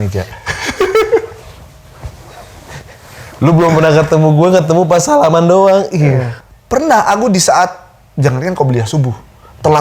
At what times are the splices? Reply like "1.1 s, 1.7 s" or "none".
6.3 s